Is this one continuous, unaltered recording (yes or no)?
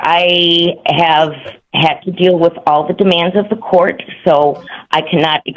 yes